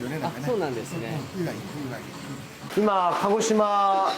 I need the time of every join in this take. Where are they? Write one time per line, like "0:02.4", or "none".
0:02.6